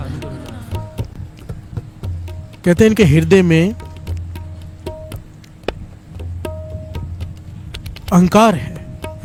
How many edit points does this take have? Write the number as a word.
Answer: zero